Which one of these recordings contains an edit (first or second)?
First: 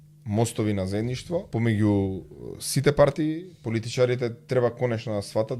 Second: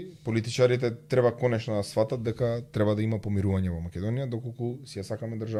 first